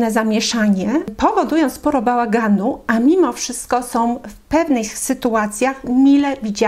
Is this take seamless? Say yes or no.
yes